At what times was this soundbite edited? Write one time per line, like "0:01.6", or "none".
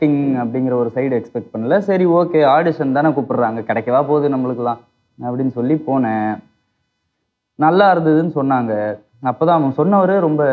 none